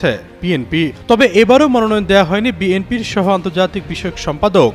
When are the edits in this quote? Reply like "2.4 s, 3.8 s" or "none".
0.9 s